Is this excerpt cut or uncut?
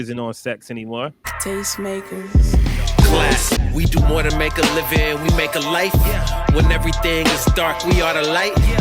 cut